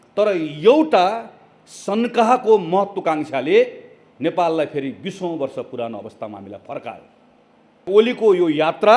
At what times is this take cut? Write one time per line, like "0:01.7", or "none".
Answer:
0:07.9